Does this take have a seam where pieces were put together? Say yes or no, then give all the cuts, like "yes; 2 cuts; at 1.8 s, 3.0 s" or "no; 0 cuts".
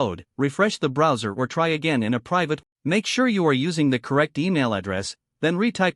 yes; 1 cut; at 2.6 s